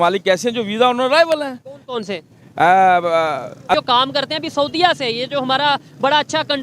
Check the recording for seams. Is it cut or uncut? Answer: cut